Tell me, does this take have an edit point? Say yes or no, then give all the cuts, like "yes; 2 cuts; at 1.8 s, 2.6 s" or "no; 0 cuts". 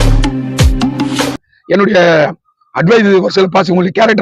yes; 1 cut; at 1.4 s